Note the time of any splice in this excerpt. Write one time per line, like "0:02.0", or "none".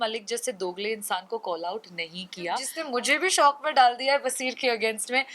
0:02.7